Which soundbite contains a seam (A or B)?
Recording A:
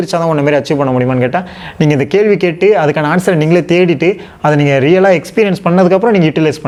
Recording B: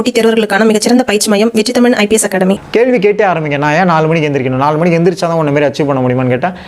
B